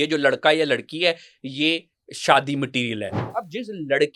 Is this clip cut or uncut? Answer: cut